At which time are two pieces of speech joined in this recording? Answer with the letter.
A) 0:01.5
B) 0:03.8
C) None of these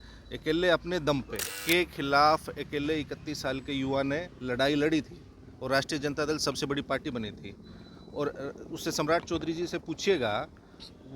A